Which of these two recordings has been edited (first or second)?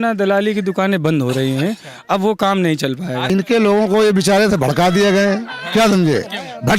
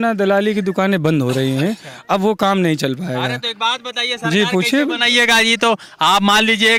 first